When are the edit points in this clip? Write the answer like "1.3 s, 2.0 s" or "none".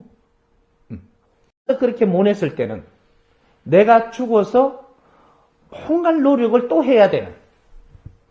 1.6 s